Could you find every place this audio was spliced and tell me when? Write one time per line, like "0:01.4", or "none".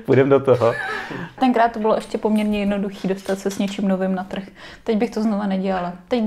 0:01.4

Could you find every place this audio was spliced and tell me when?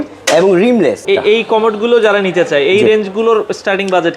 0:01.0

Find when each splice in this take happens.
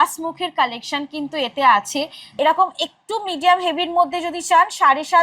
0:02.2

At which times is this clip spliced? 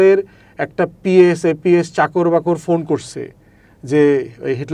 none

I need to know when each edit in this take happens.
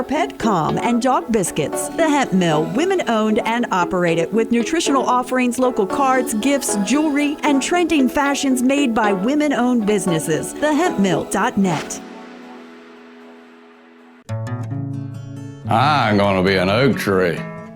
0:14.2

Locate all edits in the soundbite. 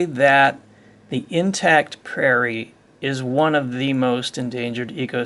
none

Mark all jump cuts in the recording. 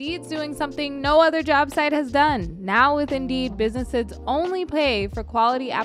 none

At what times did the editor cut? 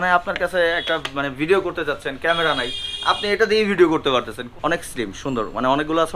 0:04.4

